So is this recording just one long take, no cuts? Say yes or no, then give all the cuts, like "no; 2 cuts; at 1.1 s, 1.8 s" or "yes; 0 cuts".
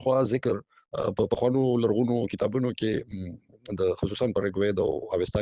yes; 0 cuts